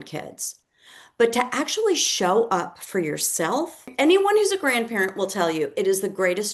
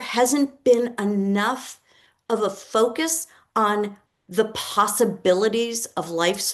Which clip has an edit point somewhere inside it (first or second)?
first